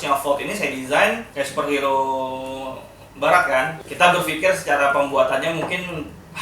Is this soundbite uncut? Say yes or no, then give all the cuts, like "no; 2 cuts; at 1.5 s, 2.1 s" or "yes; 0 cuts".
no; 2 cuts; at 1.3 s, 3.8 s